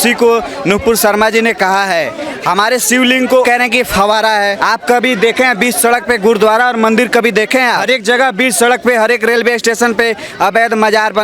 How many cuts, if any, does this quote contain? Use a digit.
3